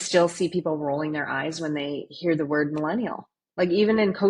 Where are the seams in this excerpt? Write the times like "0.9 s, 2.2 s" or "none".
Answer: none